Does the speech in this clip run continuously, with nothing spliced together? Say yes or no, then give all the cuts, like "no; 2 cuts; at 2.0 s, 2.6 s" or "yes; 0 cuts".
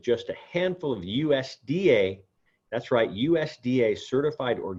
yes; 0 cuts